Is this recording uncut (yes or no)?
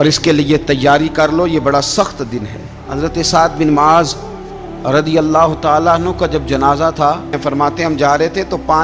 no